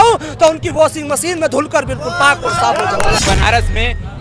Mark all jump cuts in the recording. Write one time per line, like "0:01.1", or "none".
0:03.2